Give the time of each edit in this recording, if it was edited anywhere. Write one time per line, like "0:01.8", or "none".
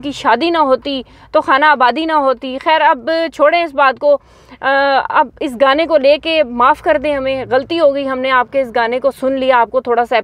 none